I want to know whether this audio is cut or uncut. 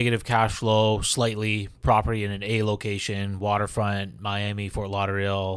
uncut